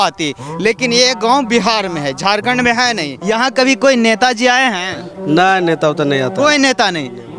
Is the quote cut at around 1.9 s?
no; 1 cut; at 3.1 s

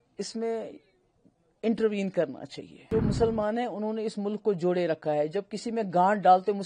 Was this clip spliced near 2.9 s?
yes; 1 cut; at 2.9 s

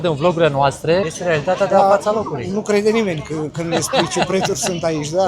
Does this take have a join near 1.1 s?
yes; 1 cut; at 1.1 s

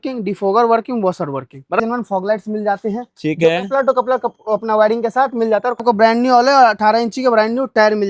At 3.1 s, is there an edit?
no; 2 cuts; at 1.8 s, 5.8 s

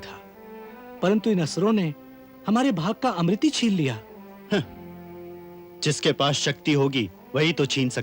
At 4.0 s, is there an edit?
no; 0 cuts

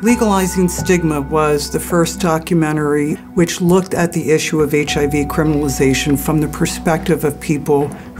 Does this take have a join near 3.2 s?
yes; 1 cut; at 3.2 s

